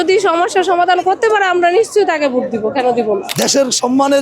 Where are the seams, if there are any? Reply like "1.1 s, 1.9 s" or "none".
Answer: 3.3 s